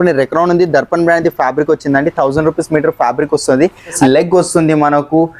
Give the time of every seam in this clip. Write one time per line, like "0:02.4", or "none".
0:04.0